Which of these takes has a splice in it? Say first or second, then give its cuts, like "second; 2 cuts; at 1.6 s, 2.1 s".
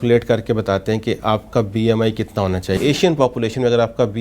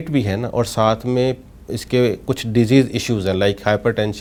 first; 1 cut; at 2.8 s